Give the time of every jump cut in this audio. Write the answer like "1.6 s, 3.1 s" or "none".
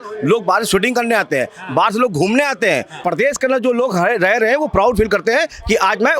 2.9 s